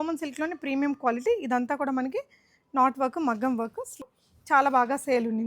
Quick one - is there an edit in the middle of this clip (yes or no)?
yes